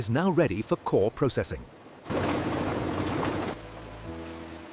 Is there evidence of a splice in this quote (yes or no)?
yes